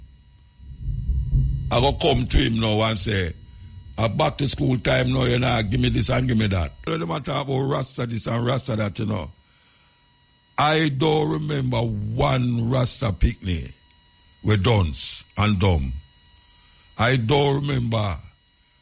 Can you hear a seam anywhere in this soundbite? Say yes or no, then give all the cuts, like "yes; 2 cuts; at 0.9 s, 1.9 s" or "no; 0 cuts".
yes; 1 cut; at 6.9 s